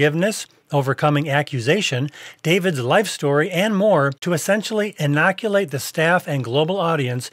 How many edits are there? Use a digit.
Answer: 1